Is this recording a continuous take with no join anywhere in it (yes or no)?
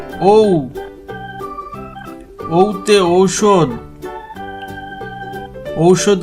yes